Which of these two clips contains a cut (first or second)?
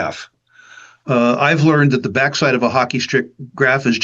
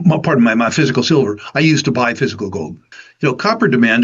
second